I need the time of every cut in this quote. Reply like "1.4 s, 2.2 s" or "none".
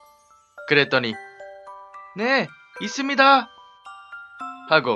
1.8 s